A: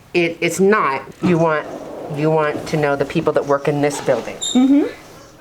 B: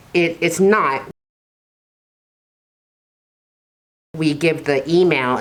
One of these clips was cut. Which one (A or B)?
A